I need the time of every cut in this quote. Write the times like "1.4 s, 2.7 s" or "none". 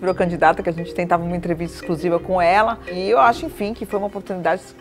none